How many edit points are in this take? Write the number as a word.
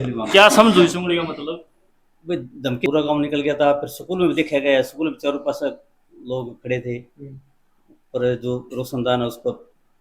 one